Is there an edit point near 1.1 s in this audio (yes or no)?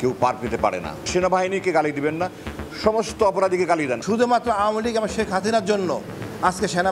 yes